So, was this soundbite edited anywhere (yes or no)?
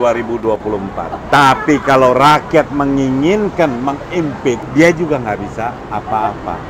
yes